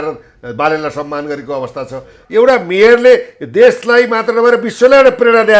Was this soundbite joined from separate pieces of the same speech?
yes; 1 cut; at 2.1 s

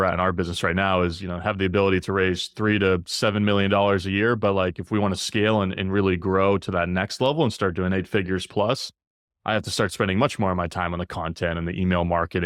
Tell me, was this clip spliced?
no; 0 cuts

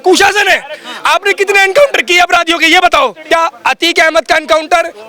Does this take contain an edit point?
yes; 1 cut; at 3.2 s

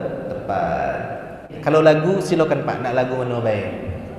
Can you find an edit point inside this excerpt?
yes; 1 cut; at 1.5 s

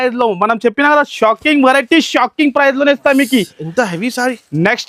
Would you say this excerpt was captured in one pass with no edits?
yes; 0 cuts

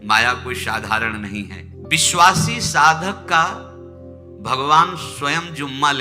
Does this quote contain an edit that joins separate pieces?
yes; 1 cut; at 1.8 s

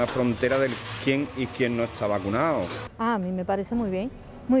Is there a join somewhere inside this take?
no; 0 cuts

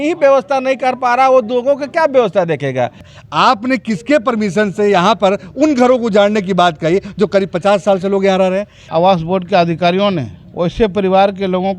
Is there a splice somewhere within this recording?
yes; 3 cuts; at 3.1 s, 8.8 s, 10.4 s

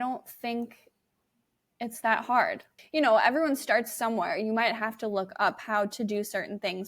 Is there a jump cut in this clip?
yes; 1 cut; at 2.7 s

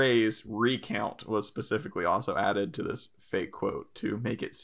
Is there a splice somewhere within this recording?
no; 0 cuts

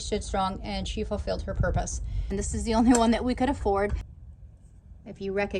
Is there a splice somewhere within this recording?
yes; 2 cuts; at 2.2 s, 4.0 s

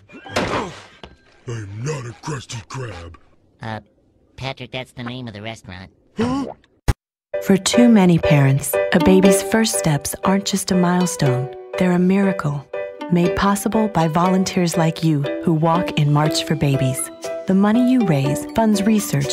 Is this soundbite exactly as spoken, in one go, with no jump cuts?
no; 1 cut; at 6.9 s

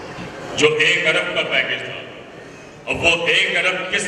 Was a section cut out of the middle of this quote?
no; 0 cuts

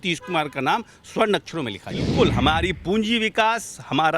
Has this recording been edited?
yes; 1 cut; at 2.1 s

